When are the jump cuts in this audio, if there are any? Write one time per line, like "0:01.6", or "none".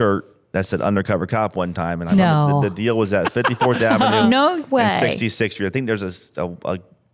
none